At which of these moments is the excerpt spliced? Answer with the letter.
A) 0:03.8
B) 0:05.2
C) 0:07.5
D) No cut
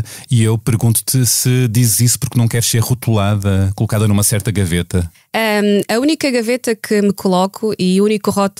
B